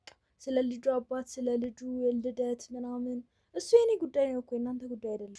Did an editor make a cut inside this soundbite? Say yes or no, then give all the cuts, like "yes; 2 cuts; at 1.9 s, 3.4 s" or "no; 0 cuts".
no; 0 cuts